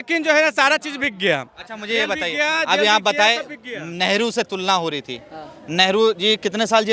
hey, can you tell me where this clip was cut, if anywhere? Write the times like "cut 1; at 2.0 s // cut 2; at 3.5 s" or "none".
none

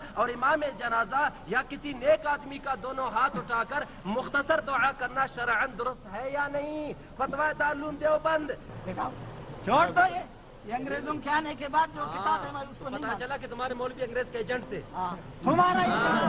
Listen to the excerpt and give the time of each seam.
cut 1; at 8.7 s

